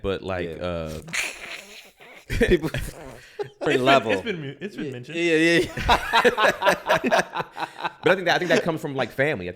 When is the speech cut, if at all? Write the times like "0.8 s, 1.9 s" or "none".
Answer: 3.6 s